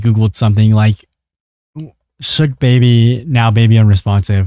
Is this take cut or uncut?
uncut